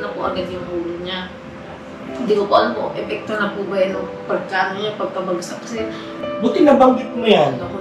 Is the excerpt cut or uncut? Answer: cut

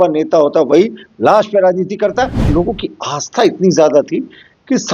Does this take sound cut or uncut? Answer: cut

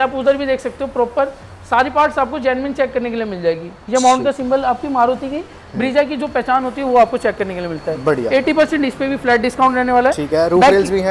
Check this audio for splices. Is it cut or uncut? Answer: uncut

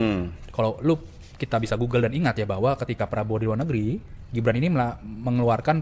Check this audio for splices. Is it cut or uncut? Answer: uncut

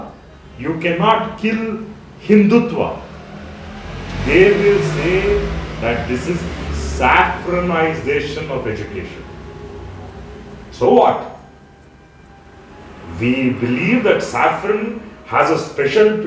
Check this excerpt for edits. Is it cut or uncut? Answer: uncut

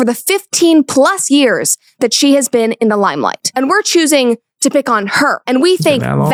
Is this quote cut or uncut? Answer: uncut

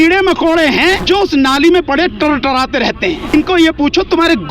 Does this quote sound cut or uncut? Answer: cut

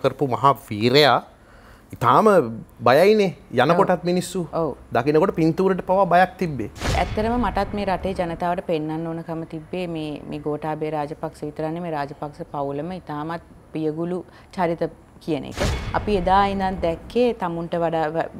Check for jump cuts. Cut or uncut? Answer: cut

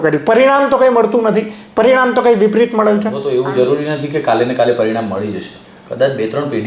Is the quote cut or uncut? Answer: cut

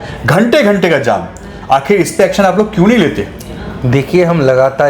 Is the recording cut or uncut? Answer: uncut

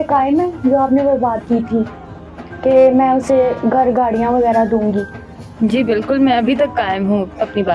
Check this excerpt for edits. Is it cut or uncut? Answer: uncut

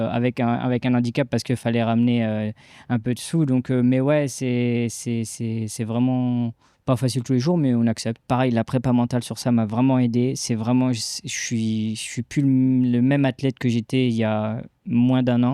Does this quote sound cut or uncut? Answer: cut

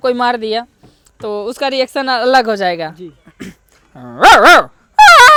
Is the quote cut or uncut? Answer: uncut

